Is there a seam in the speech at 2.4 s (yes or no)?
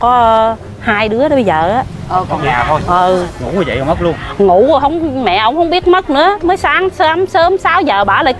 yes